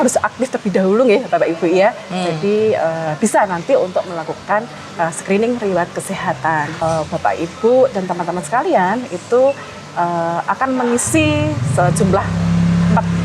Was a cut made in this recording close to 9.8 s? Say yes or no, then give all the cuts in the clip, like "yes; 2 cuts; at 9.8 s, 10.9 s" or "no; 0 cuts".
no; 1 cut; at 6.8 s